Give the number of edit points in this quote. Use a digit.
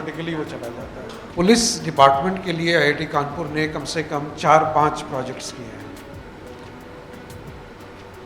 1